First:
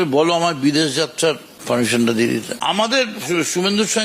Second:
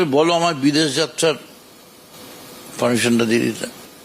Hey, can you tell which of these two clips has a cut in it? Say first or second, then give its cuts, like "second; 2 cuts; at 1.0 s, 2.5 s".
first; 2 cuts; at 1.5 s, 2.5 s